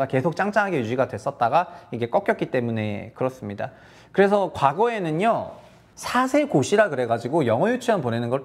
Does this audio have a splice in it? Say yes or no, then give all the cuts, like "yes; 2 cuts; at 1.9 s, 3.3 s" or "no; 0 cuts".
no; 0 cuts